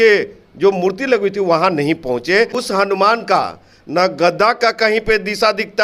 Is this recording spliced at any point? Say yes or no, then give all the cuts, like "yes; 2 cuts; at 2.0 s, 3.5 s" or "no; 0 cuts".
yes; 1 cut; at 2.6 s